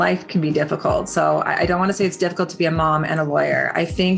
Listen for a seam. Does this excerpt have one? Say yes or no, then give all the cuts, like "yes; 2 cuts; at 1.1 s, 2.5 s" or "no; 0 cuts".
no; 0 cuts